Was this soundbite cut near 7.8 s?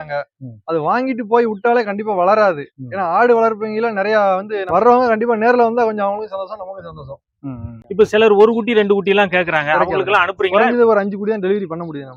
yes; 2 cuts; at 4.7 s, 7.8 s

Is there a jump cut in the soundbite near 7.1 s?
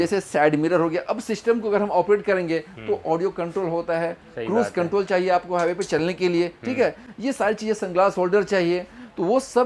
no; 0 cuts

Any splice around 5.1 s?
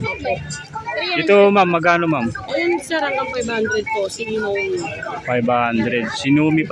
no; 0 cuts

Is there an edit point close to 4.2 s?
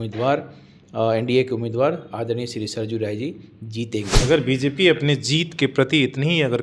yes; 1 cut; at 4.2 s

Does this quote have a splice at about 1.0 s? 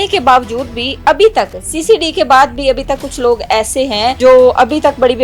no; 1 cut; at 4.2 s

